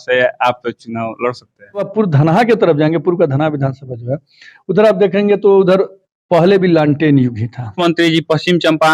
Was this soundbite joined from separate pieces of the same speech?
yes; 2 cuts; at 1.9 s, 7.7 s

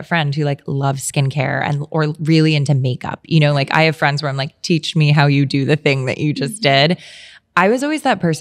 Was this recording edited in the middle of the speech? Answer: no; 0 cuts

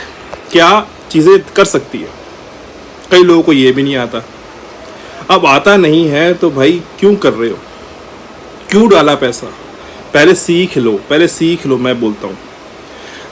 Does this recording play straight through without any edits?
yes; 0 cuts

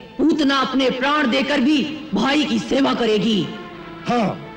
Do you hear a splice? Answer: no; 0 cuts

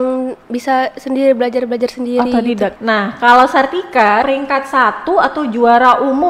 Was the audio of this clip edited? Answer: yes; 2 cuts; at 2.7 s, 4.2 s

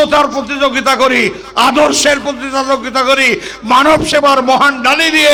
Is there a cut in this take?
no; 0 cuts

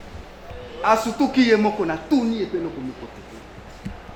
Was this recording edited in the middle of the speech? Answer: no; 0 cuts

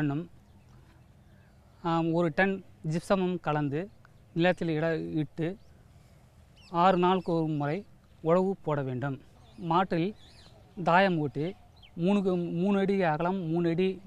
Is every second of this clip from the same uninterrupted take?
no; 1 cut; at 12.7 s

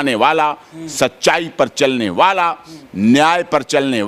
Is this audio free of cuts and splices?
yes; 0 cuts

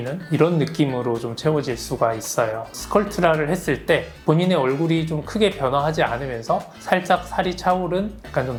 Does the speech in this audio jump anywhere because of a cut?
no; 0 cuts

